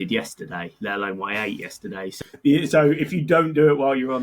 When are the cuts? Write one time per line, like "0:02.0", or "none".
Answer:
0:02.2